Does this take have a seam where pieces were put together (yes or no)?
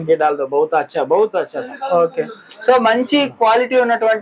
no